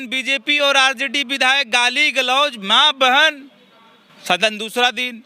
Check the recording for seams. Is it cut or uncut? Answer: uncut